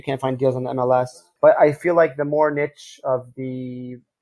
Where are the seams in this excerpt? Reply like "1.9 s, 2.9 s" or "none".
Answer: 1.2 s